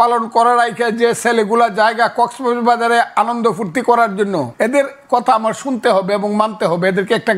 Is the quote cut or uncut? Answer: cut